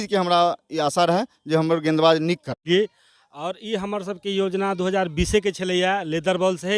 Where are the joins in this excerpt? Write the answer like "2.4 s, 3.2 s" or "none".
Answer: 2.6 s

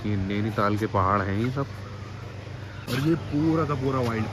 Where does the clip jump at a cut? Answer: none

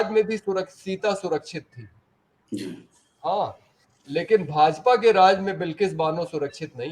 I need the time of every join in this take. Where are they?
none

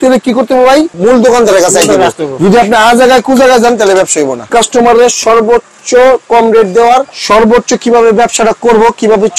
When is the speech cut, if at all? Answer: 0.9 s, 4.5 s, 7.1 s

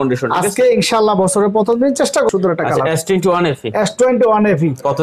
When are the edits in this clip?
2.3 s

